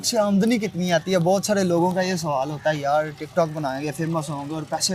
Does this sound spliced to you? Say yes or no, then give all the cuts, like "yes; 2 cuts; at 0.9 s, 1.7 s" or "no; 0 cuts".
no; 0 cuts